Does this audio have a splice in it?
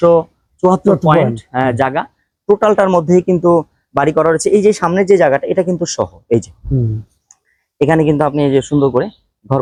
no; 0 cuts

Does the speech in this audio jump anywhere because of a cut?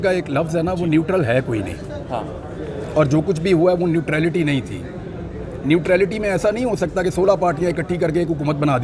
no; 0 cuts

